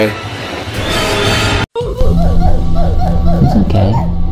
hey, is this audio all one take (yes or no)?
no